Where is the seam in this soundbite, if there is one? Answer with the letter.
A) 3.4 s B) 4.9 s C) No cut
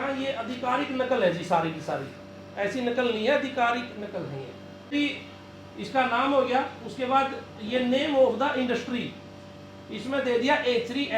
B